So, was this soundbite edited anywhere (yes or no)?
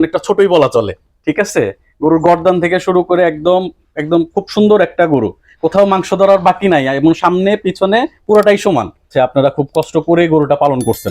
yes